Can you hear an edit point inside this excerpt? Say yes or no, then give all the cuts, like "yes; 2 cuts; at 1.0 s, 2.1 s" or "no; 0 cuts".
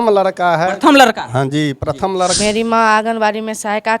yes; 1 cut; at 2.4 s